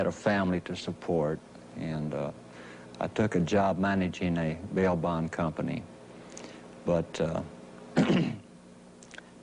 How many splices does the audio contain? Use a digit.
1